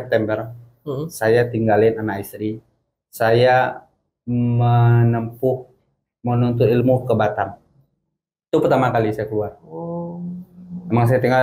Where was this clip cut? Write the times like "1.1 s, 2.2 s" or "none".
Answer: none